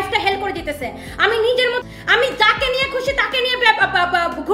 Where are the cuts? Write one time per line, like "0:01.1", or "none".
0:01.8